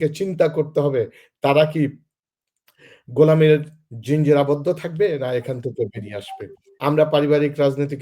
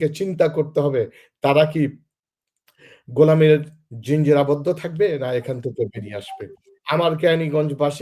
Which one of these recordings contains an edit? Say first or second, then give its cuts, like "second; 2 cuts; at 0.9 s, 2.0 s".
first; 1 cut; at 6.6 s